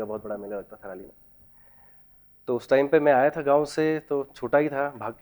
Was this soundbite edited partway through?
no; 0 cuts

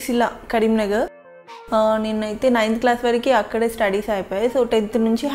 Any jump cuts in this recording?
yes; 1 cut; at 1.2 s

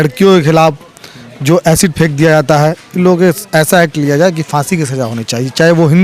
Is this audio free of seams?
yes; 0 cuts

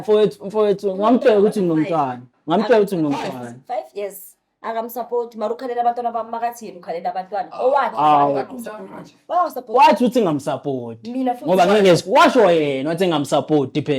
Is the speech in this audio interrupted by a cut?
no; 0 cuts

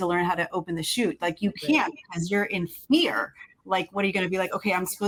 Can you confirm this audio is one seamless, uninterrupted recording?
yes; 0 cuts

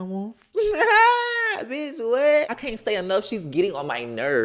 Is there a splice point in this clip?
yes; 1 cut; at 2.5 s

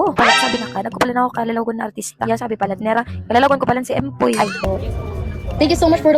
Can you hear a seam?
yes; 1 cut; at 4.6 s

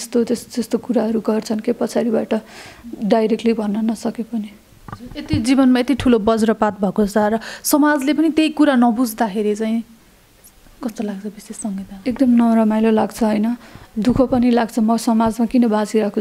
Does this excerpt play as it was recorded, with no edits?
yes; 0 cuts

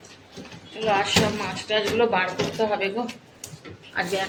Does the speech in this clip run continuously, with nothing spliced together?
yes; 0 cuts

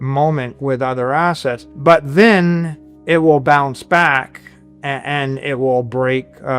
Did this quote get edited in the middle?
yes; 1 cut; at 1.7 s

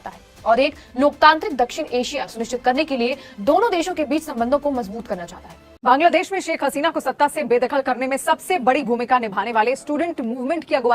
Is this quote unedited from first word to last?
no; 1 cut; at 5.6 s

